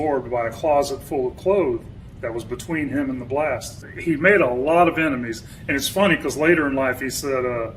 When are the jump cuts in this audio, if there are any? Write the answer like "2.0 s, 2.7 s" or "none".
3.9 s